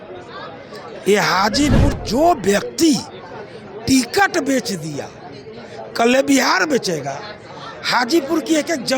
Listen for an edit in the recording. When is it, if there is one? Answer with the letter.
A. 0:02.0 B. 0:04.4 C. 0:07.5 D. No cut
A